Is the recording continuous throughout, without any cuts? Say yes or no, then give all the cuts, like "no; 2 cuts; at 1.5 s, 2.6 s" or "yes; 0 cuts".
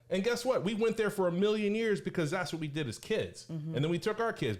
yes; 0 cuts